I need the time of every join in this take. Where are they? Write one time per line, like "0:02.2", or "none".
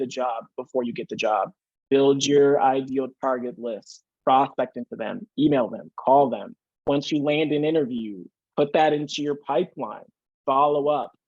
0:01.8